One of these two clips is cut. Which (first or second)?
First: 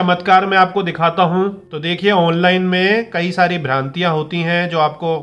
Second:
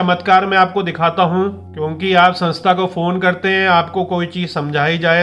first